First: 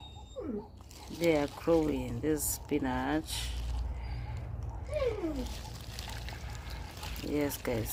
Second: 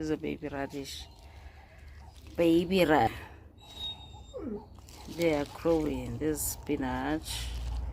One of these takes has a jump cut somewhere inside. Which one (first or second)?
second